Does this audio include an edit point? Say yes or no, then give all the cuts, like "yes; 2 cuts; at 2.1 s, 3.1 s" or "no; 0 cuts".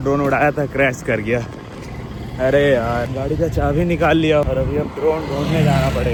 no; 0 cuts